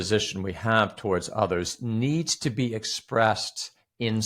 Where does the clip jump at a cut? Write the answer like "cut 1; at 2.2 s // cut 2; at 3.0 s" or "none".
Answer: none